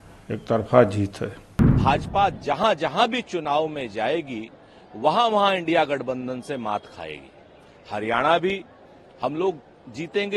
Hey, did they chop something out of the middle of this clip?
yes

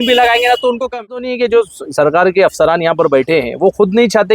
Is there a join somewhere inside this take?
yes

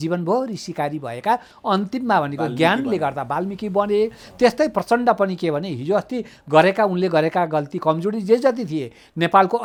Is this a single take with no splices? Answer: yes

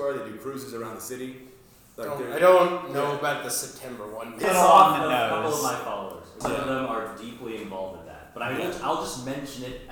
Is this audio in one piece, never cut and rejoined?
no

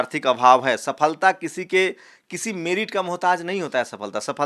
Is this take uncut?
yes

